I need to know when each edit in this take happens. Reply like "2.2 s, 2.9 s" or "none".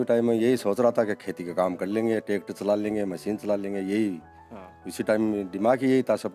none